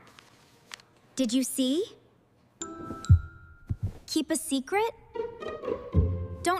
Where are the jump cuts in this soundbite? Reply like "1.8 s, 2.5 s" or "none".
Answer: 2.6 s